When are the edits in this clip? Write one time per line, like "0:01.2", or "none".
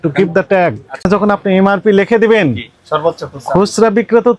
0:01.0